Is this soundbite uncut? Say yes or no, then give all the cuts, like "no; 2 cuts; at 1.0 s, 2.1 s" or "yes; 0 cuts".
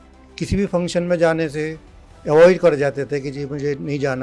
yes; 0 cuts